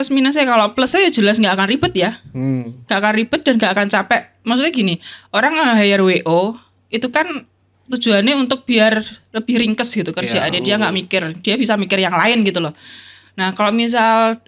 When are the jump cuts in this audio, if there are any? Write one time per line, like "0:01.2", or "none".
none